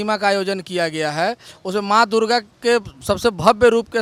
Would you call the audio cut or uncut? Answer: uncut